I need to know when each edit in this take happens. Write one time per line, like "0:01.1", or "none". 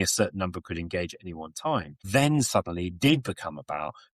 0:02.0